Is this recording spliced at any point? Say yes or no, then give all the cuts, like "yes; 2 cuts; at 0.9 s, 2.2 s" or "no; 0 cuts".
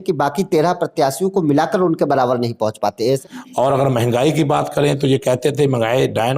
yes; 1 cut; at 3.2 s